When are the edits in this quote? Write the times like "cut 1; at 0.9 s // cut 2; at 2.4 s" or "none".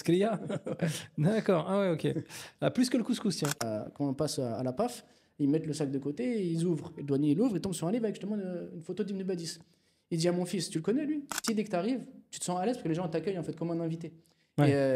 cut 1; at 3.6 s // cut 2; at 11.3 s